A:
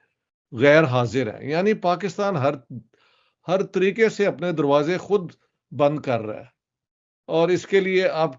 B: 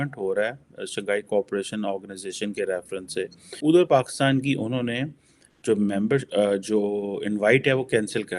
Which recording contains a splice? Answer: B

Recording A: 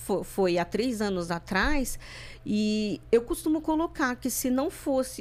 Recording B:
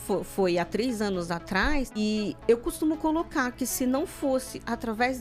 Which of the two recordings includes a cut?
B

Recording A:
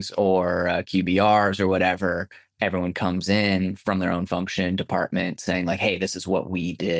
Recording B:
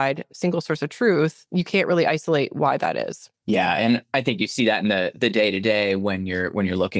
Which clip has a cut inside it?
B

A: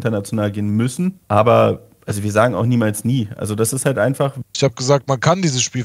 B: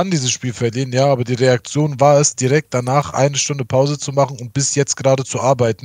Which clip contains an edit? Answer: A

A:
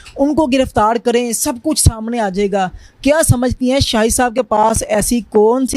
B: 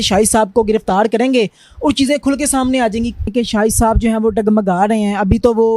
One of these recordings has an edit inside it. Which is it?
B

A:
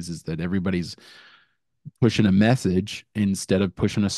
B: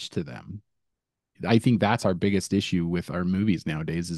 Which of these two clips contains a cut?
B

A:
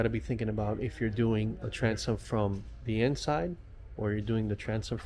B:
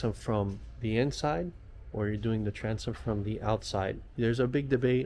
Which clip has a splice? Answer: B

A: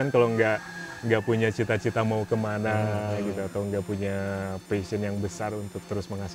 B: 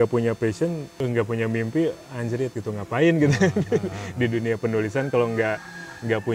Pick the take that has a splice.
B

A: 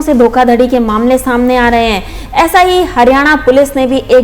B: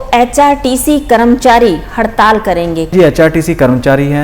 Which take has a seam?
B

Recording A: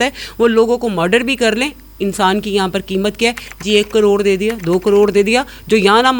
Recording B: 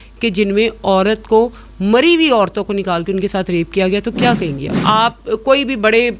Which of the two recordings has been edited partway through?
B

